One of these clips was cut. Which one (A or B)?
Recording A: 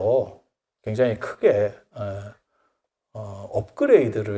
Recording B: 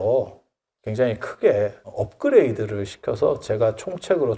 B